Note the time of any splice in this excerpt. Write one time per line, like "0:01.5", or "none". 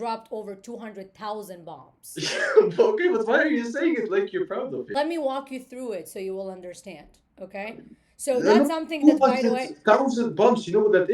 0:04.9